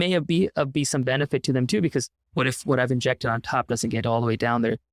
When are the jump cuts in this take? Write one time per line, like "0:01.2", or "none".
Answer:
0:02.2